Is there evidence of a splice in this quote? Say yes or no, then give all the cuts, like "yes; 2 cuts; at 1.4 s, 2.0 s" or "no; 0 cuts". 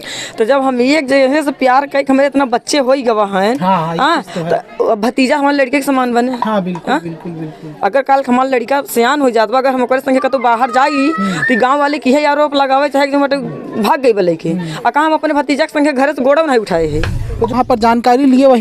yes; 1 cut; at 17.5 s